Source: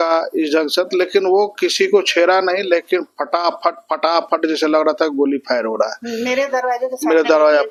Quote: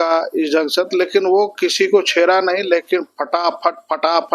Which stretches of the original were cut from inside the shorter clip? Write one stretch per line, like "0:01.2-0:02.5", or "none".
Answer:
none